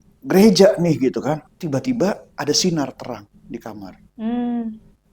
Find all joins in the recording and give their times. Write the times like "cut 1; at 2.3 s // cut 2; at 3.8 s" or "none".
cut 1; at 1.5 s // cut 2; at 2.3 s